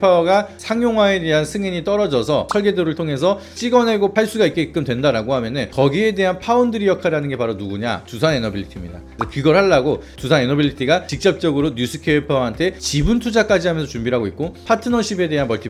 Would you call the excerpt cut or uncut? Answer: uncut